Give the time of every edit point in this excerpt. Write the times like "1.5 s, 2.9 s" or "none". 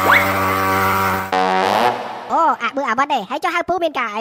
none

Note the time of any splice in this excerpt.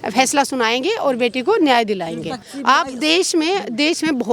2.4 s

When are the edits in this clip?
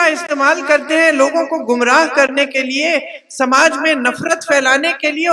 none

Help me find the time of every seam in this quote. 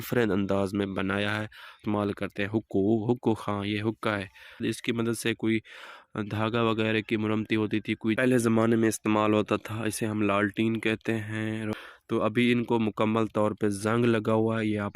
1.8 s, 4.6 s, 8.2 s, 11.7 s

